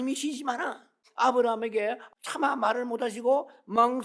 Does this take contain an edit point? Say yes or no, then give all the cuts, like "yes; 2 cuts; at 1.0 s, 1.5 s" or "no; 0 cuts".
yes; 2 cuts; at 1.0 s, 2.0 s